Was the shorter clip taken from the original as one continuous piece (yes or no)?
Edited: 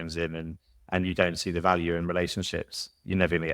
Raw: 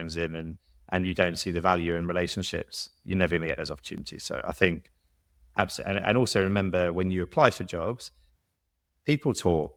yes